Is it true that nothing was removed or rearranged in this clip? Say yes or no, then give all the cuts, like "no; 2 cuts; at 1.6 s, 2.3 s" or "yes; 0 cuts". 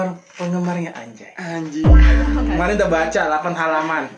yes; 0 cuts